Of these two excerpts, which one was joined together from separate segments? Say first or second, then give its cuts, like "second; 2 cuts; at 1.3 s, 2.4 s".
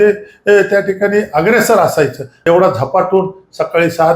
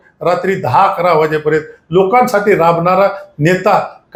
first; 1 cut; at 2.3 s